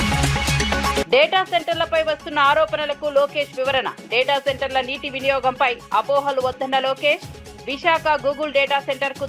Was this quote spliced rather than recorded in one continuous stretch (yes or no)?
yes